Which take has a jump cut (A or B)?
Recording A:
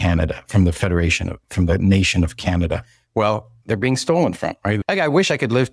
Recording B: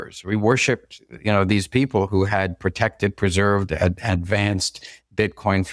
A